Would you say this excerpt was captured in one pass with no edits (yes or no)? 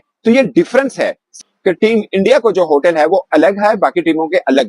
no